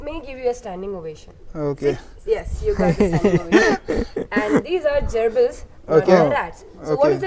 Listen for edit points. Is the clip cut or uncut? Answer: uncut